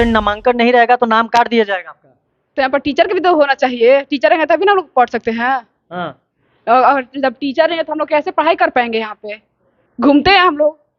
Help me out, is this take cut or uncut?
uncut